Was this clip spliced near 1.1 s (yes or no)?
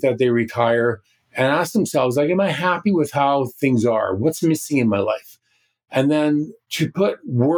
no